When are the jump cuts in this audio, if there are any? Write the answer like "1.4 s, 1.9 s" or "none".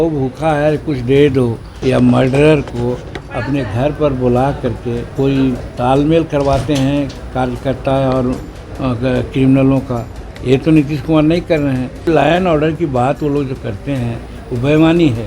1.7 s, 5.0 s, 12.1 s